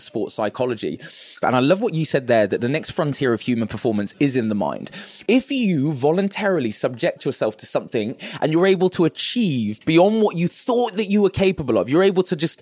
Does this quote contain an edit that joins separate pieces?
yes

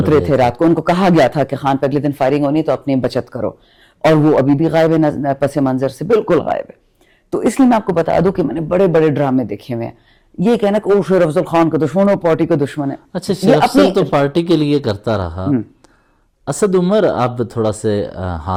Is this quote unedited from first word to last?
yes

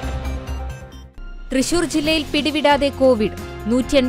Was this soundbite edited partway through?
yes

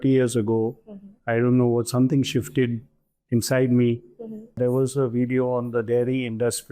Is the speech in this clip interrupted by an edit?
yes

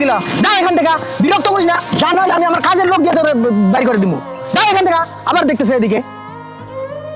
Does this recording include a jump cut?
yes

